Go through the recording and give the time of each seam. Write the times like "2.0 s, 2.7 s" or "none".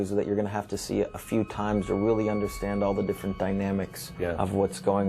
4.0 s